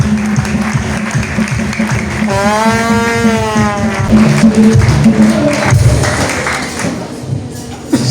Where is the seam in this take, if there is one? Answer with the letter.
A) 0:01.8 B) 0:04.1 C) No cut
B